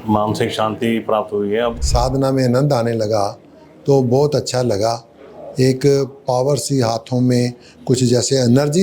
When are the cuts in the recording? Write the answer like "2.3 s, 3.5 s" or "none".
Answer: 1.8 s